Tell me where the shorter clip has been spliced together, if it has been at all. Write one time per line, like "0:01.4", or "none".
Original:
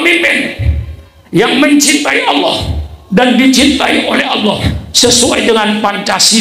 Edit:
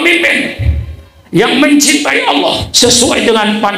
0:02.7